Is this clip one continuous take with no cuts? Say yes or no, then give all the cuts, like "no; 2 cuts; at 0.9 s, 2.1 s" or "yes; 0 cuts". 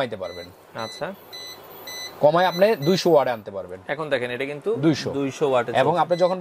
yes; 0 cuts